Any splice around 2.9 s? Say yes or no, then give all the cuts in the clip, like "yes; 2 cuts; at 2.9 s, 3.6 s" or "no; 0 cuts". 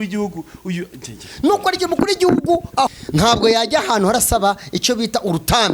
yes; 1 cut; at 2.9 s